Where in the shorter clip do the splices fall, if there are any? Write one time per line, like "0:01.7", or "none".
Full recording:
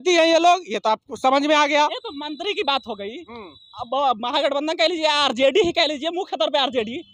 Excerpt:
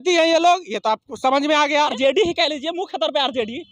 0:01.9